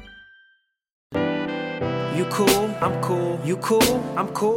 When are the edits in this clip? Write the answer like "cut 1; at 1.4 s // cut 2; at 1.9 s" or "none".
cut 1; at 1.1 s